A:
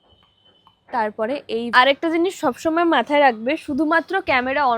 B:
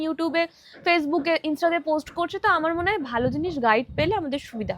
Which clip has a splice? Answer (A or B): A